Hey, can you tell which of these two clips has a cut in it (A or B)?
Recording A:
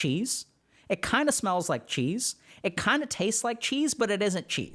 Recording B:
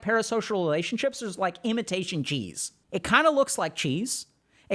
B